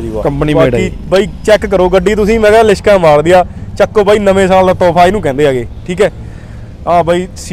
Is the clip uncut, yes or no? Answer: yes